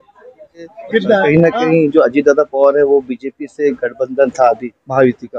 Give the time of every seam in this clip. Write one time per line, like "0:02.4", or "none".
0:01.2